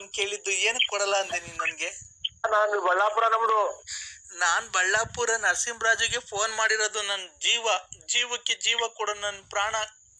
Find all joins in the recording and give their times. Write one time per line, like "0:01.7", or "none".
0:02.4